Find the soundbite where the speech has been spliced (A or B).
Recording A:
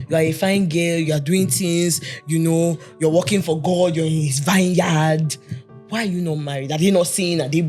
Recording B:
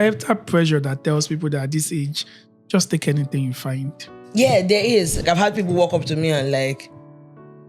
B